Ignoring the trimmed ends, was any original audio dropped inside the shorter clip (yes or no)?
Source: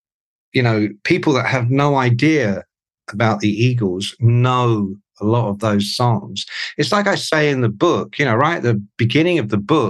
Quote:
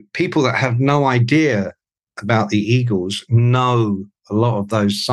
no